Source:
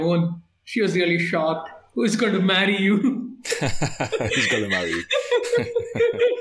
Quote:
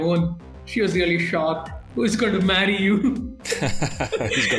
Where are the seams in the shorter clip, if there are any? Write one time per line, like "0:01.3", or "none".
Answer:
none